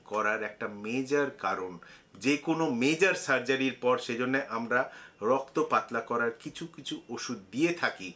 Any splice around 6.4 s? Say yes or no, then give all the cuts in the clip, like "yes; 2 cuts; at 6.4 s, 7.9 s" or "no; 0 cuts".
no; 0 cuts